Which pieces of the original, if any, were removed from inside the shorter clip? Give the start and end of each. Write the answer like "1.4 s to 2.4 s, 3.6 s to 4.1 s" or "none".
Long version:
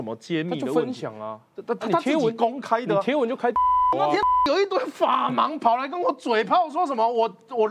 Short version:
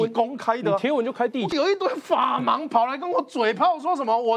3.7 s to 4.3 s

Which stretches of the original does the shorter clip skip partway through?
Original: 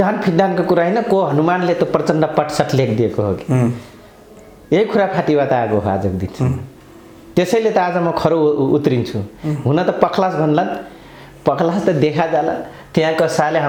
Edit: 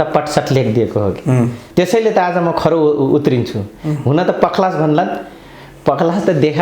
3.8 s to 7.2 s

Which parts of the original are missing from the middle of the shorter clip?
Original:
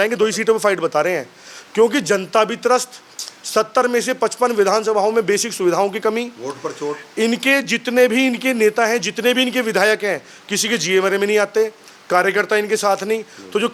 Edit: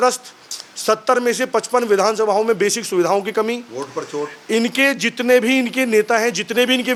none

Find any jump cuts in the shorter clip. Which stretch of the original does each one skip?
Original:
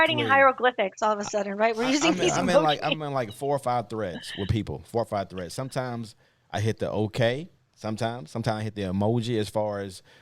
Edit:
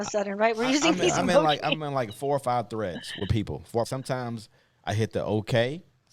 5.1 s to 5.5 s

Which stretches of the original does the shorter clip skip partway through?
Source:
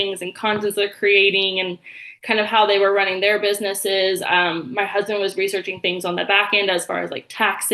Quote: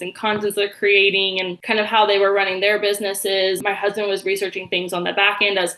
1.7 s to 2.1 s, 4.2 s to 4.7 s

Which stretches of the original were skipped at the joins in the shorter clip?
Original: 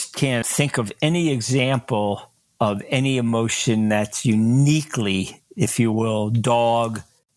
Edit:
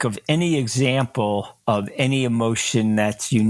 2.3 s to 2.4 s

